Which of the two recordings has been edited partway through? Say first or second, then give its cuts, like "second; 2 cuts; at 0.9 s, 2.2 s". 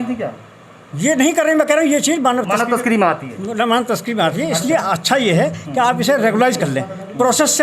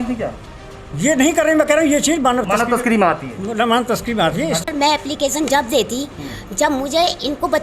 second; 1 cut; at 4.7 s